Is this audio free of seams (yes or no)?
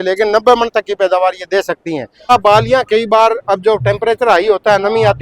no